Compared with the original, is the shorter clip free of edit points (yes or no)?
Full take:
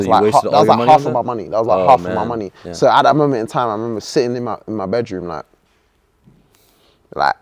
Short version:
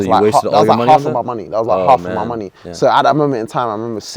yes